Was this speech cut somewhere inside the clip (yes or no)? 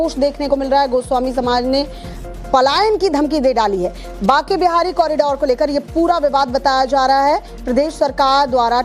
no